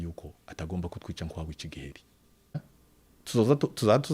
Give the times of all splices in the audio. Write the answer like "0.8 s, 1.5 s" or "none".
2.6 s